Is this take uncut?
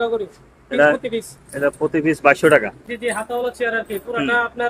no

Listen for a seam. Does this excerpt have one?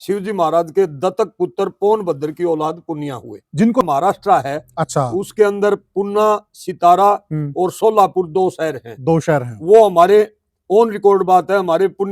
yes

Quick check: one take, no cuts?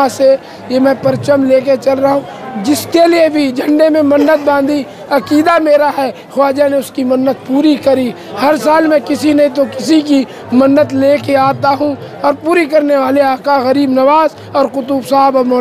yes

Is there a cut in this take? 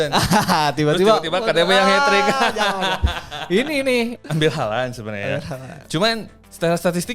yes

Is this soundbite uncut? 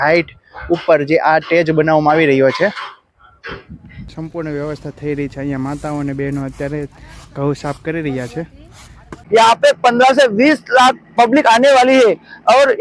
no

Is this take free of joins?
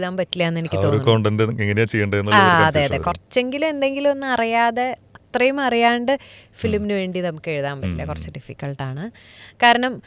yes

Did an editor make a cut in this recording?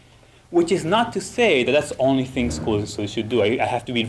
no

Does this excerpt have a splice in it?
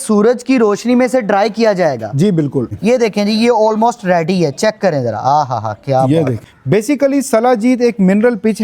yes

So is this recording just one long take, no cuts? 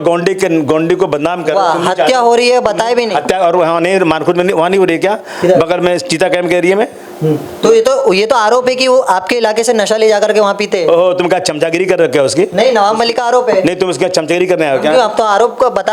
yes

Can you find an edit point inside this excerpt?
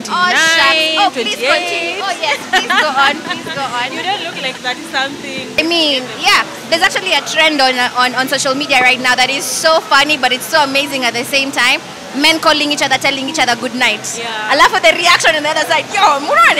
yes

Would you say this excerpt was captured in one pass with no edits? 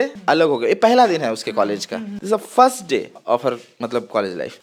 yes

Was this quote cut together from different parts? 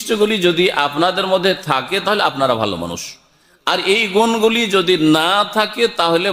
no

